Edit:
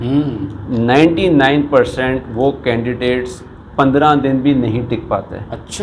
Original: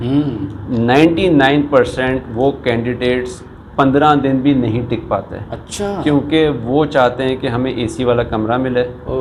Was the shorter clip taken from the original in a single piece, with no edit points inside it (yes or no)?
yes